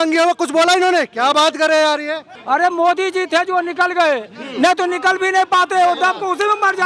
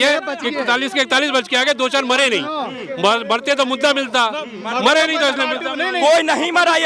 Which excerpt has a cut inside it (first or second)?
first